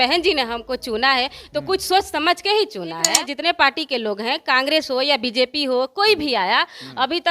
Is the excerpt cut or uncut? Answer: cut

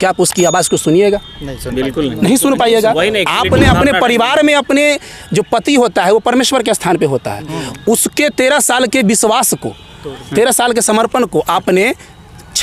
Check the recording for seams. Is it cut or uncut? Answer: uncut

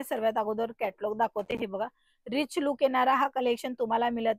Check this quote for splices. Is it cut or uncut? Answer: uncut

